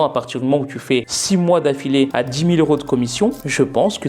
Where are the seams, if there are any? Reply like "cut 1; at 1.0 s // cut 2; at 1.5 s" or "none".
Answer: cut 1; at 1.1 s // cut 2; at 2.1 s